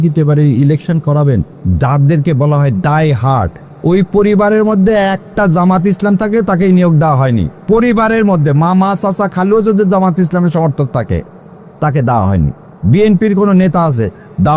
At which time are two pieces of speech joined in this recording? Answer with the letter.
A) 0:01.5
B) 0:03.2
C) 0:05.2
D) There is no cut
A